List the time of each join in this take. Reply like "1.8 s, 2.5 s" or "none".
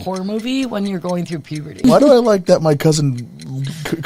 1.8 s